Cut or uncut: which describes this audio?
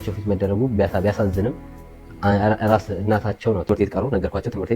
cut